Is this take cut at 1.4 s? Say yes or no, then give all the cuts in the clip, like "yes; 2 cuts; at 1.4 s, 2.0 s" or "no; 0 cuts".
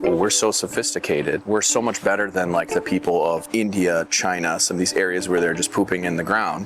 yes; 2 cuts; at 1.4 s, 3.4 s